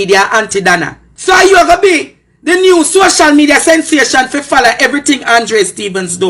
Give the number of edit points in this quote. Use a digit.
1